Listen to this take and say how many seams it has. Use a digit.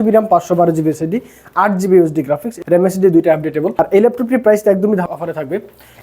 2